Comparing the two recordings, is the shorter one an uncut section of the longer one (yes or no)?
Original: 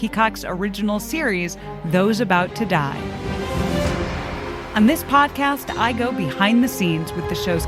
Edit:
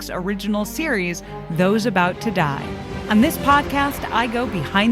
no